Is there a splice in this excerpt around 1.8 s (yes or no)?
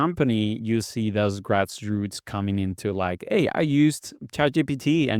no